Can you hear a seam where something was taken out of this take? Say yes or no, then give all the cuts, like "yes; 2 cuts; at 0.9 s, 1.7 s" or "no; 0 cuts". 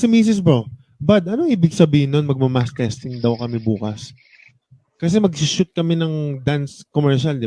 no; 0 cuts